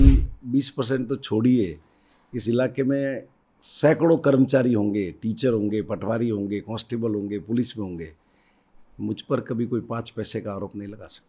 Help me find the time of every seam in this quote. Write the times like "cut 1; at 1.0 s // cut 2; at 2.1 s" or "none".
none